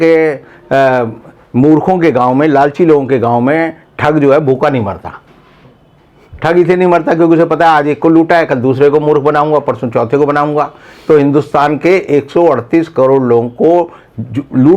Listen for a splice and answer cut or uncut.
uncut